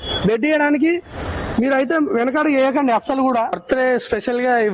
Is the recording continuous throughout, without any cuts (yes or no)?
no